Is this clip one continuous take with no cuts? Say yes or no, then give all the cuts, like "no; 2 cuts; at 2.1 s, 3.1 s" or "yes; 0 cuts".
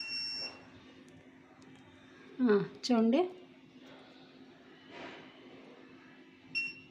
yes; 0 cuts